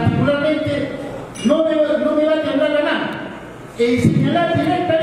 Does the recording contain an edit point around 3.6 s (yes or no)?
no